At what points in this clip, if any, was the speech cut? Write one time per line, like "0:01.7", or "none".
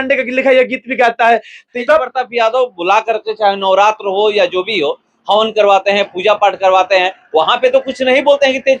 0:01.7